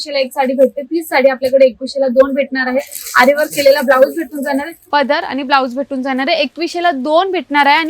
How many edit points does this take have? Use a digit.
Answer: 1